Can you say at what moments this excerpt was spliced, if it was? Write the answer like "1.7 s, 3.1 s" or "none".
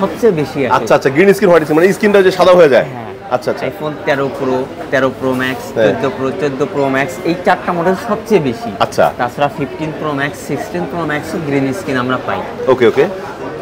none